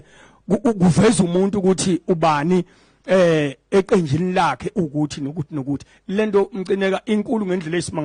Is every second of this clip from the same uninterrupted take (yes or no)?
yes